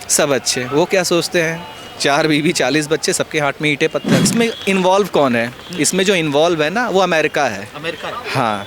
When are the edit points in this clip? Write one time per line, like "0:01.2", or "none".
0:04.3